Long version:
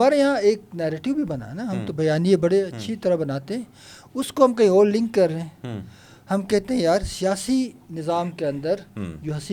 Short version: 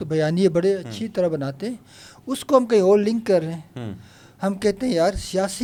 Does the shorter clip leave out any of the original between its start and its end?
no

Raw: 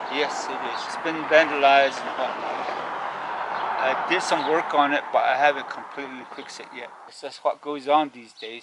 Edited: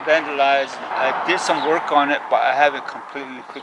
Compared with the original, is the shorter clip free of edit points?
no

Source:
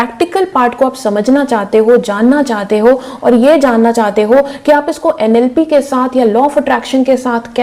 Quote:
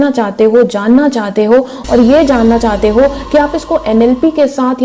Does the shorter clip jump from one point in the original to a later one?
no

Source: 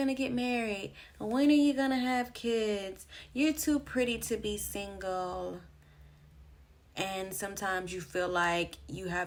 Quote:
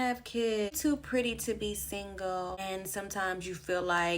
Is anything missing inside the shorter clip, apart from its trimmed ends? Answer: yes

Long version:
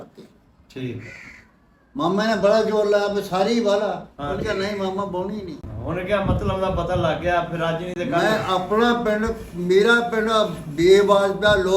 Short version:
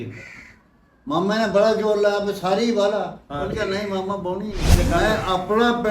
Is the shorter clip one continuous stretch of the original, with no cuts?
no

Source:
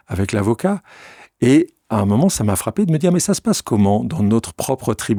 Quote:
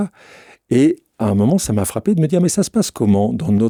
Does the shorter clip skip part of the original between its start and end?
no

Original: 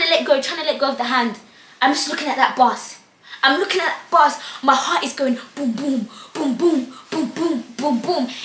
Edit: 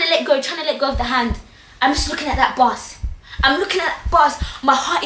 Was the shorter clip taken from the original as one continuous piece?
yes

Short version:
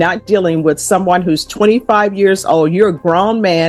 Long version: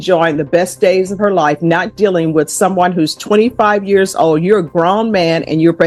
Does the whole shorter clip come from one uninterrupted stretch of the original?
yes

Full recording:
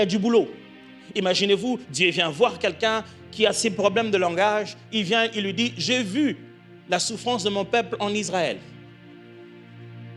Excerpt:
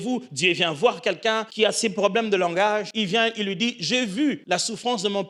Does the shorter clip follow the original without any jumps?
no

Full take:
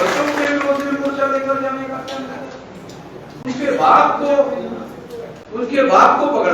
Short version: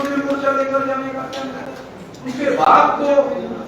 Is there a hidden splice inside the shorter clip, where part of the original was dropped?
yes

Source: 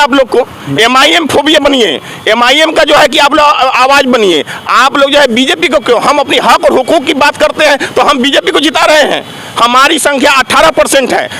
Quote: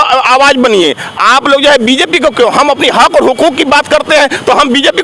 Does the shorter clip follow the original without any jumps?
yes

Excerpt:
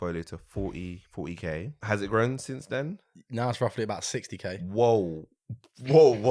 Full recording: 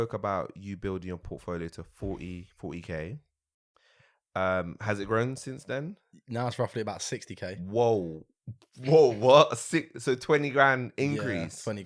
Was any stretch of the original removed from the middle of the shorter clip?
yes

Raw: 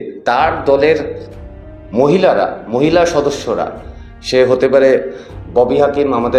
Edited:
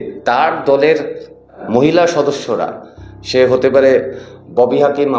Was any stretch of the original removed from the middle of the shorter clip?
yes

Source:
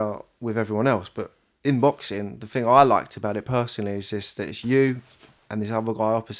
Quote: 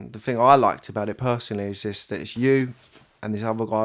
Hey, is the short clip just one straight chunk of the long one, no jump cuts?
yes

